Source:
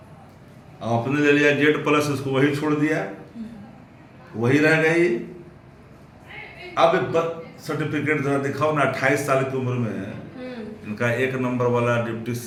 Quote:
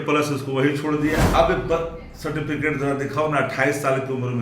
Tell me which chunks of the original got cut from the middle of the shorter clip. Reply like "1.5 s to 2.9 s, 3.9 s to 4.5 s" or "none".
3.1 s to 6.7 s